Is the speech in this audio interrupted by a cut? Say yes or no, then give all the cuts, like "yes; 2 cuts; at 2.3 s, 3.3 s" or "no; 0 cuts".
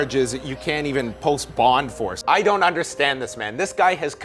yes; 1 cut; at 2.2 s